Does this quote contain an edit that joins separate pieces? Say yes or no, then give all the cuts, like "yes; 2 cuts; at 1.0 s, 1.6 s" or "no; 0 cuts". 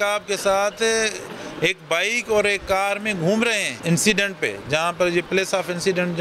yes; 1 cut; at 3.7 s